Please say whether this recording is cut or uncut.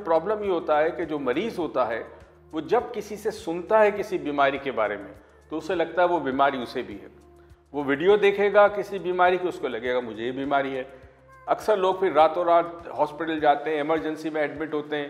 uncut